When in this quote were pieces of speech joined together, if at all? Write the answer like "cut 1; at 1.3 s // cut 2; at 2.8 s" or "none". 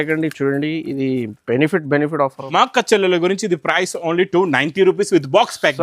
cut 1; at 2.4 s